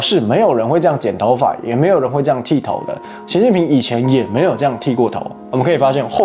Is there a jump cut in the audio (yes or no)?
no